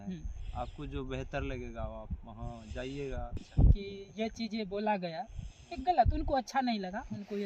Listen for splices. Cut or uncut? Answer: cut